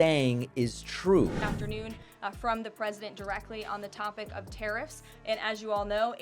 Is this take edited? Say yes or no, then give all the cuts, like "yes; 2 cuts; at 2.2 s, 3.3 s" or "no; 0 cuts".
yes; 1 cut; at 1.6 s